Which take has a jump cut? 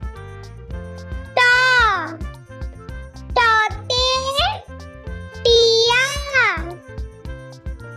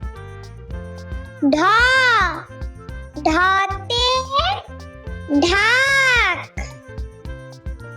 second; 2 cuts; at 1.3 s, 6.8 s

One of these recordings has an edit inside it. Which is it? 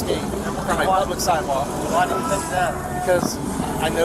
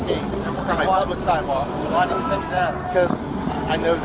second; 1 cut; at 2.8 s

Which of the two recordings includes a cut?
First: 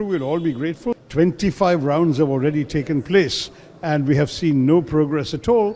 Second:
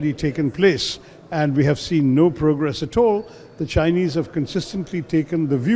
first; 1 cut; at 1.0 s

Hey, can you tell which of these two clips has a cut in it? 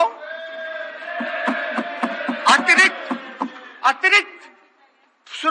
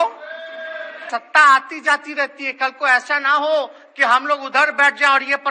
second; 1 cut; at 1.0 s

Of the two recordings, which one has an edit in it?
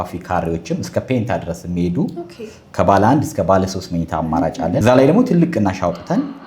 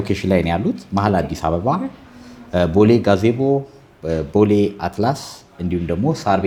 first; 1 cut; at 4.8 s

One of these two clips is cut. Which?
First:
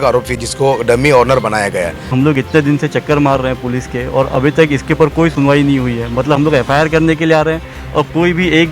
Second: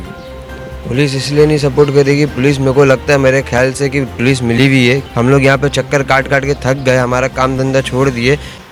first; 1 cut; at 2.1 s

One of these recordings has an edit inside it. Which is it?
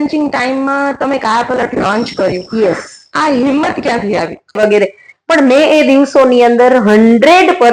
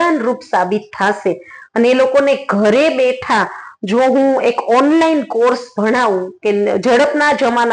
first; 1 cut; at 4.6 s

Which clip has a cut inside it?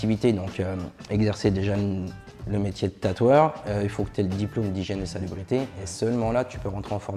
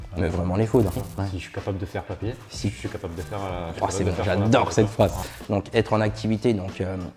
second; 2 cuts; at 1.0 s, 5.2 s

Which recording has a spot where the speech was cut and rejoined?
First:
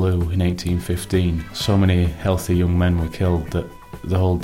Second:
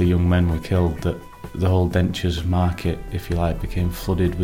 first; 1 cut; at 1.5 s

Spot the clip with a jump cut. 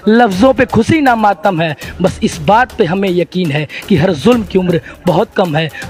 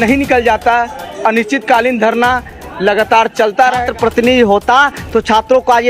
second; 1 cut; at 3.9 s

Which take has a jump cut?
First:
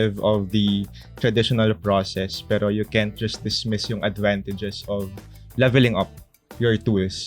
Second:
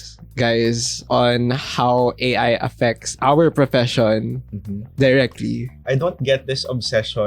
second; 2 cuts; at 0.9 s, 5.7 s

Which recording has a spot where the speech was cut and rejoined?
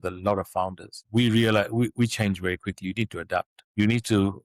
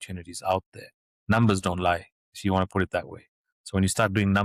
first; 2 cuts; at 1.0 s, 3.6 s

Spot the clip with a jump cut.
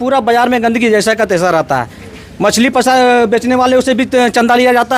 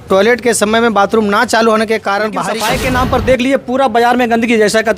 second; 1 cut; at 2.5 s

